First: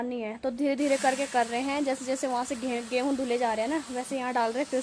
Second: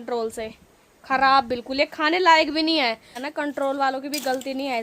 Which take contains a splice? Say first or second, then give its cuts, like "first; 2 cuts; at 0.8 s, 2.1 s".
second; 1 cut; at 3.2 s